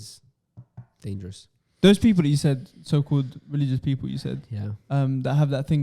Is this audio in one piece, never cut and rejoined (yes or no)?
yes